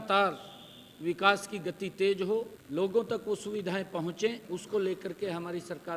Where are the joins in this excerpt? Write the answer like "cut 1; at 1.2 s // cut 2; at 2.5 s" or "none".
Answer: cut 1; at 2.6 s // cut 2; at 4.4 s